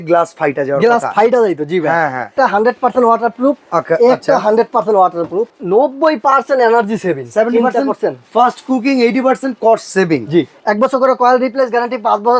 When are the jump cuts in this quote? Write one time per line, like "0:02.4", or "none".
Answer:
0:02.3
0:05.6
0:10.6